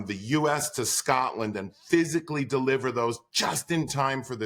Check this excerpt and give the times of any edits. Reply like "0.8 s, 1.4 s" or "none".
none